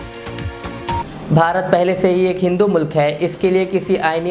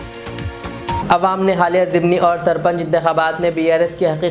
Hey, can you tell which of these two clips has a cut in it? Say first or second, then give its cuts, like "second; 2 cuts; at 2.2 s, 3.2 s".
second; 1 cut; at 1.0 s